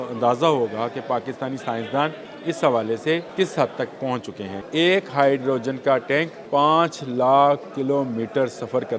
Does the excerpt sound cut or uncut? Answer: cut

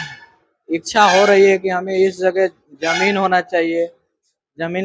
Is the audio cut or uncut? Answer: uncut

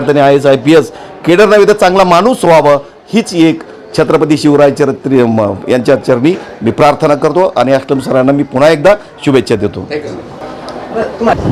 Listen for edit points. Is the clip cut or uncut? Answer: uncut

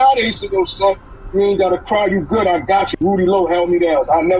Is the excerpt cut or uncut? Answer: cut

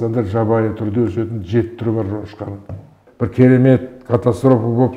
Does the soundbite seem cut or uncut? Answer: cut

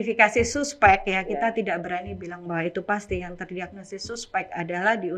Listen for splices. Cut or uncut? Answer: uncut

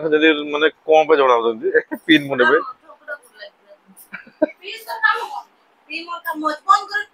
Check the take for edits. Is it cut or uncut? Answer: uncut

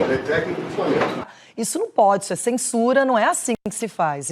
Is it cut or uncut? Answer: cut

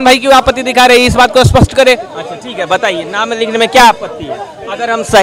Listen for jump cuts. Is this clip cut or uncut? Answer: uncut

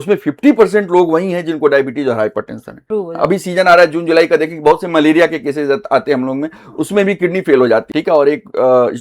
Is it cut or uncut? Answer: cut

